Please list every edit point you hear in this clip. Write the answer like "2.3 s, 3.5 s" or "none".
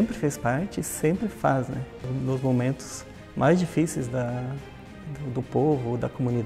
2.0 s